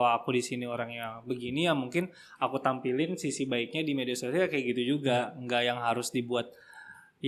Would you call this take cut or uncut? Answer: uncut